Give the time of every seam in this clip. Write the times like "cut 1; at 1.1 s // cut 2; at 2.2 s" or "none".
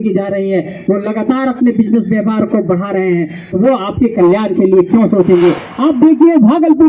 cut 1; at 5.7 s